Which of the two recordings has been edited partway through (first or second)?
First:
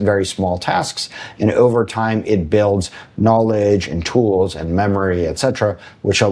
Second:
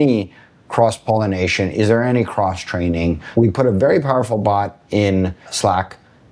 second